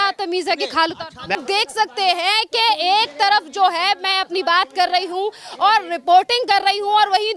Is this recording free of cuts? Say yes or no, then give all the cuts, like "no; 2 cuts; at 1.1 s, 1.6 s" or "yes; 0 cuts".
no; 1 cut; at 1.3 s